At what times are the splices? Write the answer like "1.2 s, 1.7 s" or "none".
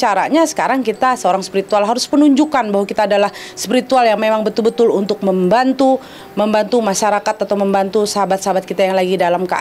none